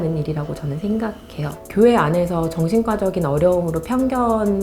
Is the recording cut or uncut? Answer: cut